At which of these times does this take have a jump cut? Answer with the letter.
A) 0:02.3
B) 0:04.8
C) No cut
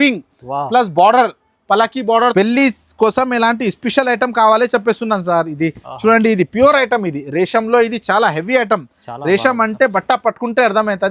A